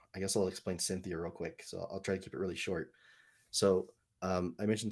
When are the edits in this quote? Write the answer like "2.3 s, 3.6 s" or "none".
none